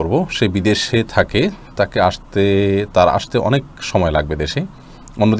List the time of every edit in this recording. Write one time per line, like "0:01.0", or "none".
none